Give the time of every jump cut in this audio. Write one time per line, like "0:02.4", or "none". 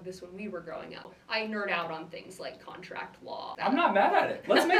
0:01.1
0:03.6